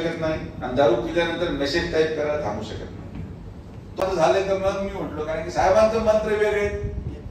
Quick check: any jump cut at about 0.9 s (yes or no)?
no